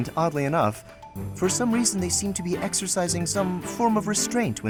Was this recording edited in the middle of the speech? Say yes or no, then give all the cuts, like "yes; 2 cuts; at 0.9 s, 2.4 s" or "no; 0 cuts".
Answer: no; 0 cuts